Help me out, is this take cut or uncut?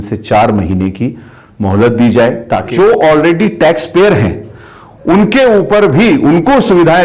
cut